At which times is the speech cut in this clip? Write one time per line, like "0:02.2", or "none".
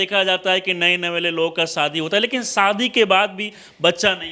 none